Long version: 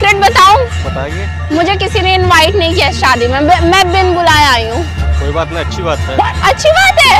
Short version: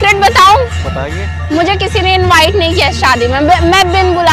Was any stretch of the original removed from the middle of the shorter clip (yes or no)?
no